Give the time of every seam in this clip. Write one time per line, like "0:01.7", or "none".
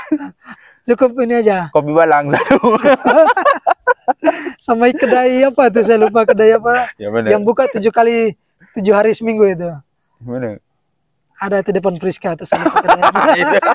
none